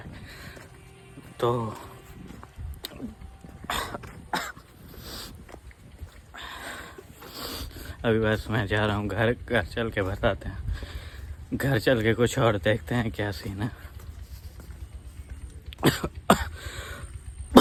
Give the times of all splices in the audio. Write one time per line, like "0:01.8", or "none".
none